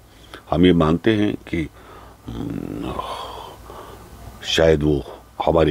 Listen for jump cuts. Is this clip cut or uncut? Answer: uncut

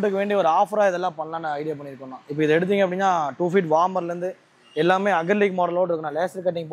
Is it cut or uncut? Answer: uncut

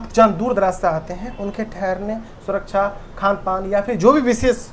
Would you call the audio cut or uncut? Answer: uncut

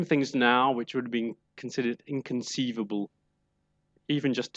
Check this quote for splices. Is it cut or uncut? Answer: uncut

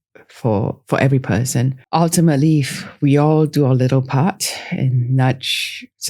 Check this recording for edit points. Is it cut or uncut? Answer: cut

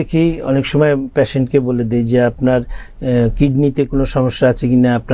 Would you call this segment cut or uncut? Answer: uncut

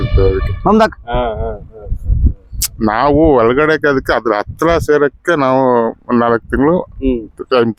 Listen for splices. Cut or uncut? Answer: uncut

